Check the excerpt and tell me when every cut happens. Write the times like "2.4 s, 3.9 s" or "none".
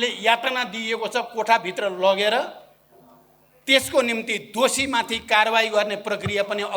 none